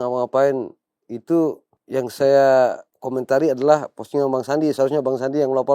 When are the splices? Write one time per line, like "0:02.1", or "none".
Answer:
0:01.7